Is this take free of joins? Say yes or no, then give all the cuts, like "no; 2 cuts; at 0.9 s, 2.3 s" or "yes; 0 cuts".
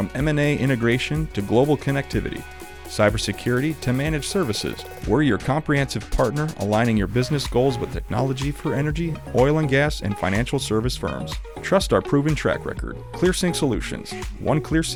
yes; 0 cuts